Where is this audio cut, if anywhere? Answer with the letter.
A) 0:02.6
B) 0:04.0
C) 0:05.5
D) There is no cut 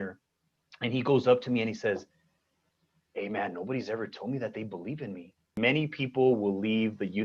C